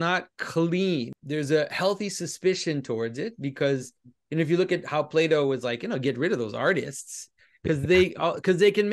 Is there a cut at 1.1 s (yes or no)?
yes